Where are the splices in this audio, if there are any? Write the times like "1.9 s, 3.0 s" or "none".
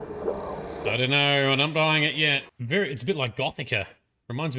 2.5 s